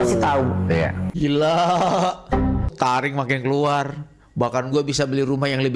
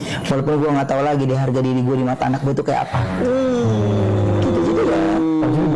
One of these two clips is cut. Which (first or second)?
first